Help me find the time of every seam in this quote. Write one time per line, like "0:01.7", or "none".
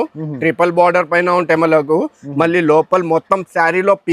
none